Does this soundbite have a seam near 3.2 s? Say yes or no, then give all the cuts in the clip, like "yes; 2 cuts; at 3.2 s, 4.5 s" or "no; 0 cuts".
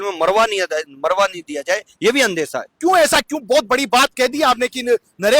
no; 0 cuts